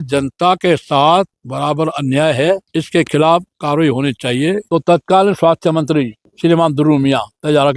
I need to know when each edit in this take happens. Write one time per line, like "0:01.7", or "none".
0:01.4
0:02.7
0:04.6
0:06.2

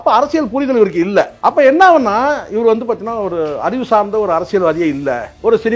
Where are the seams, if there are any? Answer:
0:01.3

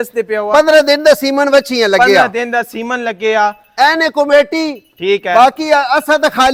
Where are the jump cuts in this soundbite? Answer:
none

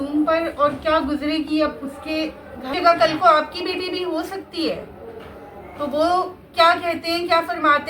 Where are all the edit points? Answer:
0:02.7

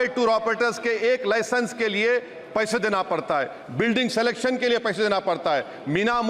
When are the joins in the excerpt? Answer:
none

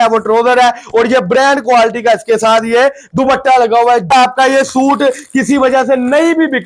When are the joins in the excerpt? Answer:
0:04.1

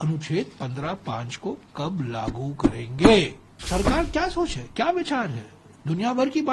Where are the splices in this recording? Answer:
0:03.6

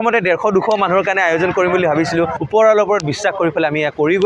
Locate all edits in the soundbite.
0:02.4

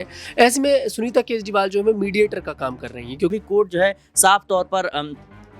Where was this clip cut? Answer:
0:03.3

